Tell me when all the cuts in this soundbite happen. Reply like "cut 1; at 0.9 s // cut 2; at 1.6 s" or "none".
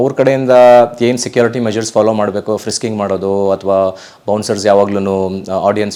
none